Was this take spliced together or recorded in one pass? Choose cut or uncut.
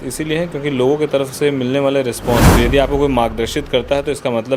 cut